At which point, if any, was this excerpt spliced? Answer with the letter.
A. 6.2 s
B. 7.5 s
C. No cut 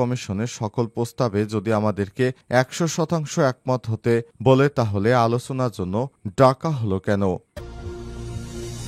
B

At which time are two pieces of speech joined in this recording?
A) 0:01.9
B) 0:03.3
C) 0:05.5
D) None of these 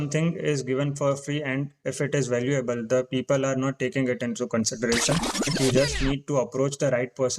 C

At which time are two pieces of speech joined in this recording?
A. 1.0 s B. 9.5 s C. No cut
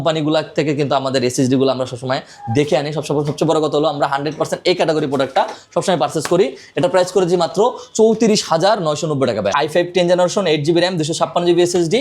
B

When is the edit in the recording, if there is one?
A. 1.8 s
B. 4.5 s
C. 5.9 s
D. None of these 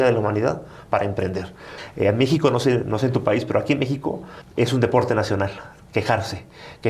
A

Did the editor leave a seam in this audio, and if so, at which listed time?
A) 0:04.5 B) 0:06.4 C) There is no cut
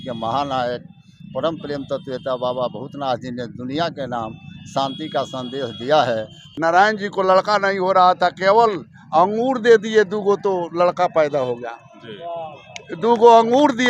B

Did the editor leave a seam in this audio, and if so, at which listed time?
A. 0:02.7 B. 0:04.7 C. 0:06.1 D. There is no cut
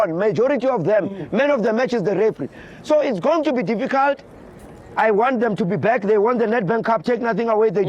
D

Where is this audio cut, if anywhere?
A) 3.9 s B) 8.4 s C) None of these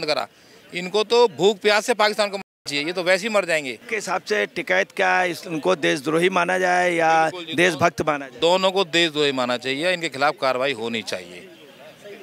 A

